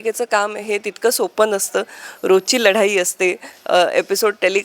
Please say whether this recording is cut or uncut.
uncut